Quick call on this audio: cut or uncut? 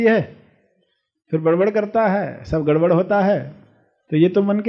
uncut